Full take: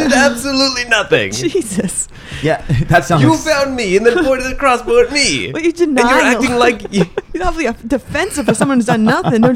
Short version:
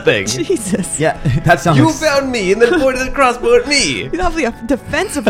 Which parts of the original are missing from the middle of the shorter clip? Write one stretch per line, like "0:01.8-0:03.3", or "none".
0:01.9-0:02.3
0:05.5-0:07.2